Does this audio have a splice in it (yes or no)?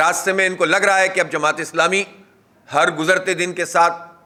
no